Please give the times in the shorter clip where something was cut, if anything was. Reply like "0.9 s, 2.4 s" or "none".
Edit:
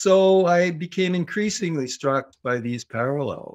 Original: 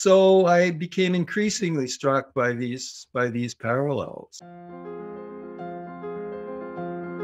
2.3 s